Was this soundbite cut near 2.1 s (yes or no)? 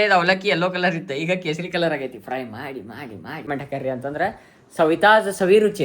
no